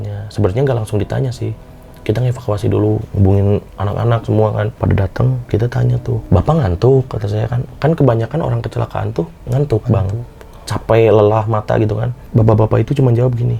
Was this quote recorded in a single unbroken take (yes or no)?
no